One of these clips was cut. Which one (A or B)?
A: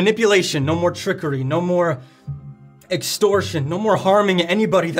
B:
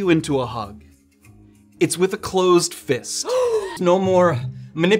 B